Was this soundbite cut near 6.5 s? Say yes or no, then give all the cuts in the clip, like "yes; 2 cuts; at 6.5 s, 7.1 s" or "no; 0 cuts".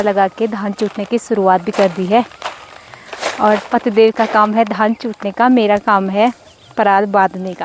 no; 0 cuts